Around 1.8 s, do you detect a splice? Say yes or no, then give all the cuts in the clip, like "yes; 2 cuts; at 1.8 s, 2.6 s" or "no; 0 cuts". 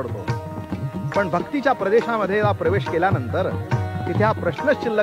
no; 0 cuts